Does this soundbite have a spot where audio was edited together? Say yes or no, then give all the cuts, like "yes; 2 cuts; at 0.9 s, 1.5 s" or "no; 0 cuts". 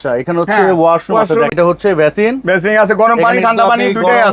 yes; 1 cut; at 1.5 s